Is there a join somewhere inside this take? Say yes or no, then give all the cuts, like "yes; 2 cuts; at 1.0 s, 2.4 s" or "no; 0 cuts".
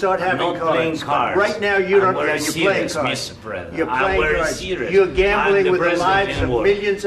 no; 0 cuts